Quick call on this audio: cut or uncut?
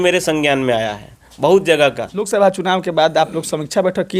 cut